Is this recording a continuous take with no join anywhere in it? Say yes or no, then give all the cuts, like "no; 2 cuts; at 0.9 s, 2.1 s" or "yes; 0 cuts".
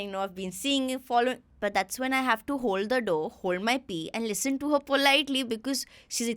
no; 1 cut; at 1.5 s